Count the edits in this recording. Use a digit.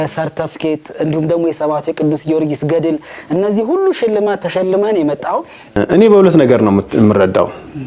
1